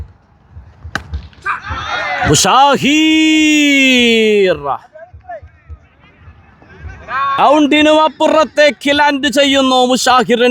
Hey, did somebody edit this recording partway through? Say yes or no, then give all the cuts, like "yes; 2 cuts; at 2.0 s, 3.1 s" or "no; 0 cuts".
yes; 1 cut; at 7.4 s